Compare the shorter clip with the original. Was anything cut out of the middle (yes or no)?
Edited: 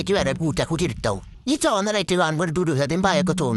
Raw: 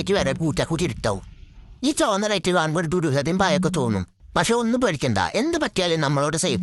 yes